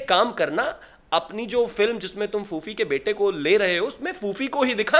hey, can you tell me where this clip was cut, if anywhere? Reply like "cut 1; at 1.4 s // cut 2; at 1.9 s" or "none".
none